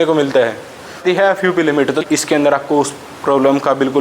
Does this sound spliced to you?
yes; 2 cuts; at 1.0 s, 2.0 s

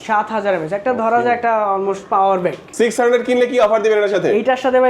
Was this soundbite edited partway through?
yes; 1 cut; at 2.6 s

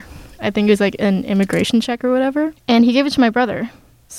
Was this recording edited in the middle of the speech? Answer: yes; 1 cut; at 2.6 s

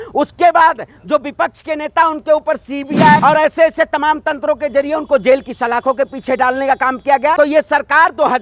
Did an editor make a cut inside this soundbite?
yes; 2 cuts; at 3.2 s, 7.4 s

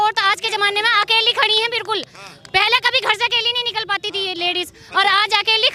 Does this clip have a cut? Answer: no; 0 cuts

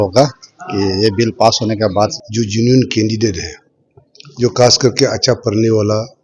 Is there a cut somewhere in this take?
yes; 1 cut; at 1.9 s

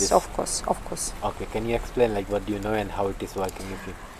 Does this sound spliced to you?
no; 0 cuts

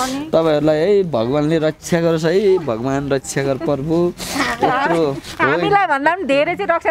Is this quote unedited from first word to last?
yes; 0 cuts

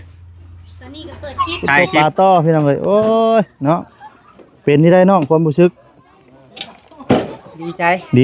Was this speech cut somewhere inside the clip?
yes; 1 cut; at 1.8 s

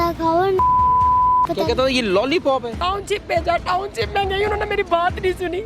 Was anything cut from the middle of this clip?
yes; 1 cut; at 2.7 s

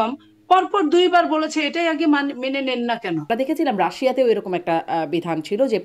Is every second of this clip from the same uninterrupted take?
no; 1 cut; at 3.3 s

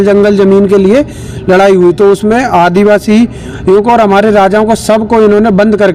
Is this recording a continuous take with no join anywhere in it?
yes; 0 cuts

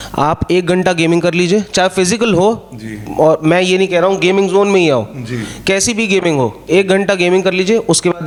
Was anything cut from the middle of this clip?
no; 0 cuts

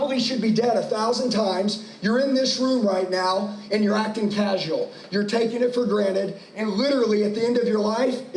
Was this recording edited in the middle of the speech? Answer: no; 0 cuts

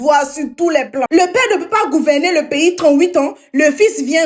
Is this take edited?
yes; 1 cut; at 1.1 s

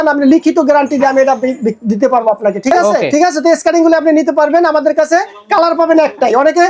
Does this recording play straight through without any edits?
no; 1 cut; at 3.1 s

